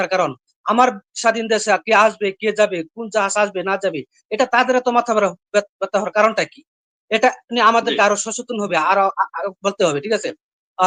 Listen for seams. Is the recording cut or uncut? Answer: uncut